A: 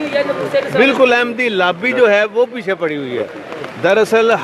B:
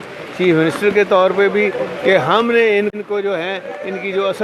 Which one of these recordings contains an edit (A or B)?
B